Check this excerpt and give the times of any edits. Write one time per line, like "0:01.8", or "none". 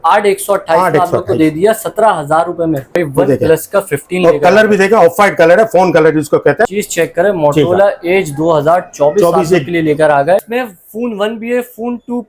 0:03.0
0:06.7
0:10.5